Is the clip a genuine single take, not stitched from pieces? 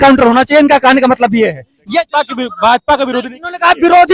yes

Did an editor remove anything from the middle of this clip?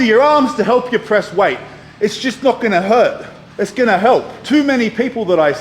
yes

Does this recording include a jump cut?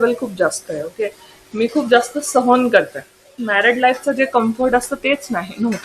yes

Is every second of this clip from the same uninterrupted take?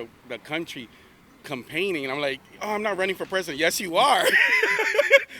yes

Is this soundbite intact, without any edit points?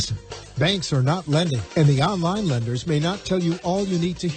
yes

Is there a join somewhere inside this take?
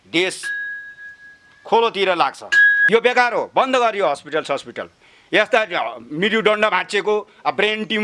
no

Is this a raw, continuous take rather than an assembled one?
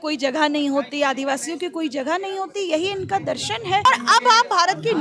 no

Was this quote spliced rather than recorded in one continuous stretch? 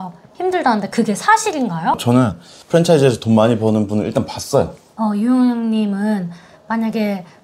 yes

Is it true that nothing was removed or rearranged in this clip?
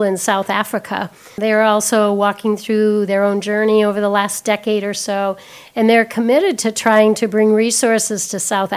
no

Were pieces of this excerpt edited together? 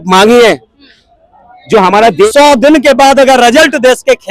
yes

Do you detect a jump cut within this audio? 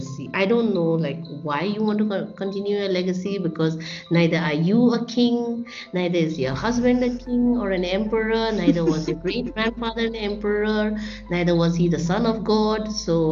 no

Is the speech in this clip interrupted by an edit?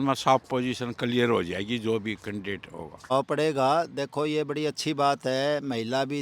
yes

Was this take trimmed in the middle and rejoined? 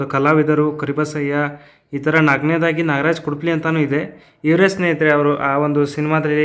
no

